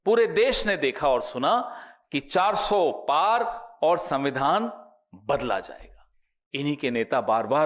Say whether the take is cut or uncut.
uncut